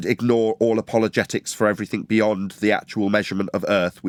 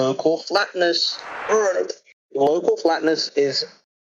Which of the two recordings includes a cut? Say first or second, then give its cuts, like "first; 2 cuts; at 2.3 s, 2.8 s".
second; 1 cut; at 1.4 s